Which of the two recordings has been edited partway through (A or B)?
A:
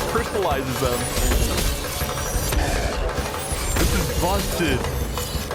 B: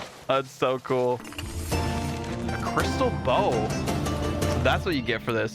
B